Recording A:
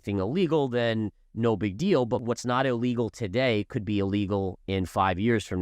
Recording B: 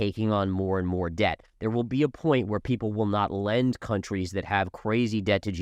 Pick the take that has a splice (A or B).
A